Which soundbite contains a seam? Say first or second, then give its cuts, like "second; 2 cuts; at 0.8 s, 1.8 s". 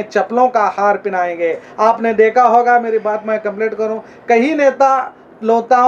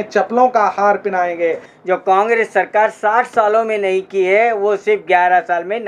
second; 1 cut; at 1.7 s